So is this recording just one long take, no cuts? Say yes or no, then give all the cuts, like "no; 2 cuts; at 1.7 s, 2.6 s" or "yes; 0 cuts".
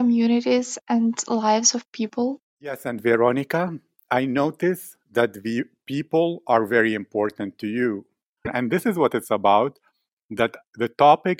no; 2 cuts; at 2.9 s, 8.4 s